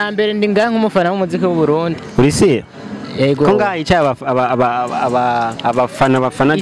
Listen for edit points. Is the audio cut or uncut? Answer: uncut